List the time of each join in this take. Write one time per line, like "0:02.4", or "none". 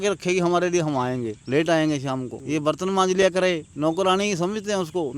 0:01.4
0:02.3
0:03.7